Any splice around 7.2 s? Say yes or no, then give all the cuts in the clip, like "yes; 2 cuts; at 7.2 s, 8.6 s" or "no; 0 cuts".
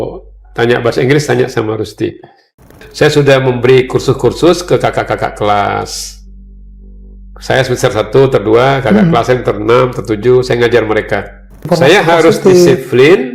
no; 2 cuts; at 2.8 s, 11.7 s